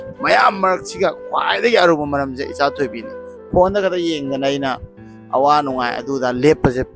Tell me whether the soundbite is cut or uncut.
uncut